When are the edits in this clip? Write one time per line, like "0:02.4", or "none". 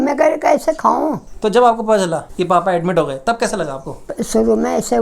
0:01.3
0:04.0